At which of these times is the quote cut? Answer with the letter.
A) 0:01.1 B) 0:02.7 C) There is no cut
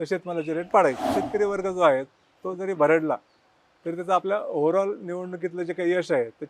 A